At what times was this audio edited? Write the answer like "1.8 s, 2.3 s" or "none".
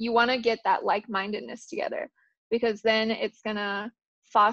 none